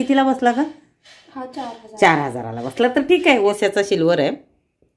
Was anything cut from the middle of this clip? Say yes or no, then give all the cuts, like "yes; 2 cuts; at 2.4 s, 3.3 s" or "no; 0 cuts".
yes; 1 cut; at 3.6 s